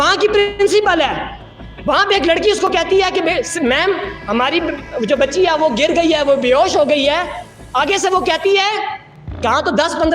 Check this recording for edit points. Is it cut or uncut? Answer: cut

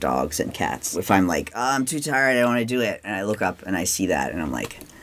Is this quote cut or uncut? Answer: cut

